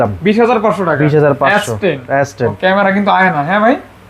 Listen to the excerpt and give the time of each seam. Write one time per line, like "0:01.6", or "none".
0:02.6